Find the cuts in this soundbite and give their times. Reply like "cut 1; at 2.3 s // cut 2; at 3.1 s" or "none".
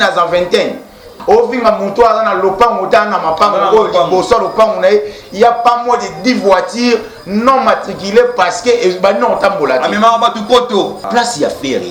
cut 1; at 1.1 s // cut 2; at 11.0 s